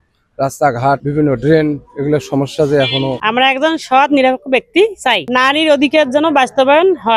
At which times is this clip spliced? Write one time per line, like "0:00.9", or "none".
0:01.0
0:03.2
0:05.2